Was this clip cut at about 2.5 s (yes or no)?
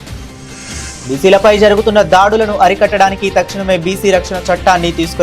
no